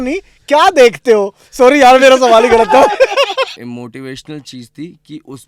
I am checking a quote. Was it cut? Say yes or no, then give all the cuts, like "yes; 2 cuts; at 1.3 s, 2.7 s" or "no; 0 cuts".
yes; 1 cut; at 3.5 s